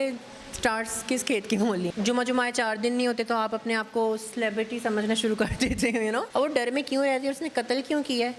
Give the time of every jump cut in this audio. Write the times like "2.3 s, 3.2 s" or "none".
1.9 s, 6.3 s